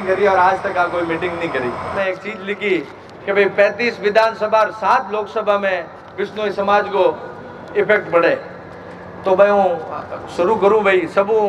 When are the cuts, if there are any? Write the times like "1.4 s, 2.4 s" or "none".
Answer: 1.9 s